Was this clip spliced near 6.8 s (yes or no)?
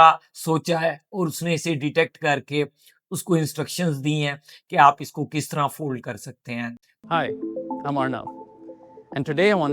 yes